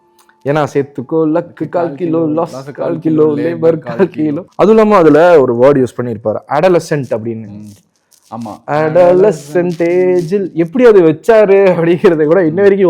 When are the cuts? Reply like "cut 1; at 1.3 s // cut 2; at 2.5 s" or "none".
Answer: cut 1; at 4.4 s